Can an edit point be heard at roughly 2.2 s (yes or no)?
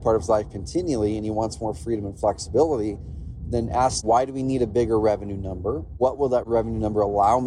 no